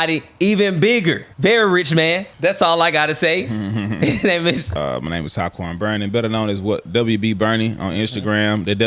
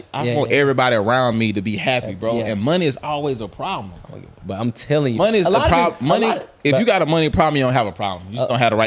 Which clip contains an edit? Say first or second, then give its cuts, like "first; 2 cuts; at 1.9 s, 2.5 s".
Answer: first; 3 cuts; at 1.3 s, 2.3 s, 4.7 s